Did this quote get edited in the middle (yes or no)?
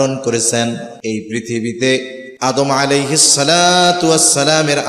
yes